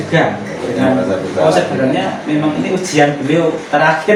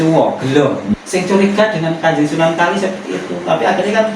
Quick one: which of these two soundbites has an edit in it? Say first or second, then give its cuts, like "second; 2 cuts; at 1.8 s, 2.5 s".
second; 1 cut; at 0.9 s